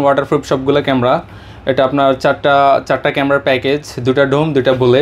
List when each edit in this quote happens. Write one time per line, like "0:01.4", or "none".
none